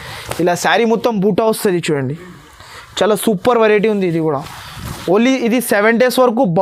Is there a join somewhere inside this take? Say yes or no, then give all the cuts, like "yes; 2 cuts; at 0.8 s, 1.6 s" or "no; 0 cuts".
no; 0 cuts